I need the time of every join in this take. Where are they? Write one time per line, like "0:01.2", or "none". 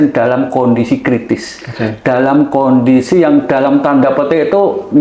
none